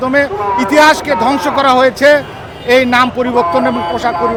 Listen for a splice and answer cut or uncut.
uncut